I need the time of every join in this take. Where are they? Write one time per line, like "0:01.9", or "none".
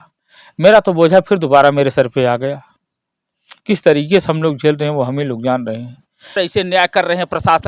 0:06.4